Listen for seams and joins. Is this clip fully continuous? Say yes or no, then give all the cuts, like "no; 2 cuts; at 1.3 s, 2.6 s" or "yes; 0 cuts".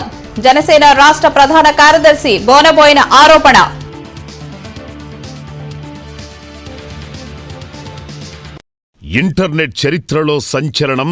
no; 1 cut; at 8.9 s